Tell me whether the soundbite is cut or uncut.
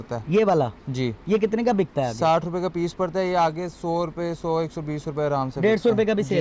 uncut